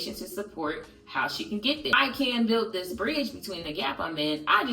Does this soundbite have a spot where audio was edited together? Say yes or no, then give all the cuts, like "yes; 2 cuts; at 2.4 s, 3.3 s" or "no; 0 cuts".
yes; 1 cut; at 1.9 s